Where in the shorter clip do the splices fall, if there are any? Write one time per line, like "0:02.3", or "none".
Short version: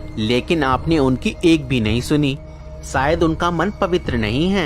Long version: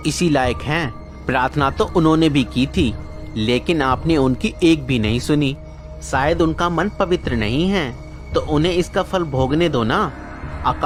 none